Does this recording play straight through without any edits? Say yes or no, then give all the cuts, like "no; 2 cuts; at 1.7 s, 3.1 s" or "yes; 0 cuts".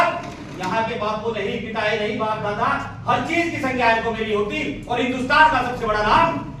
yes; 0 cuts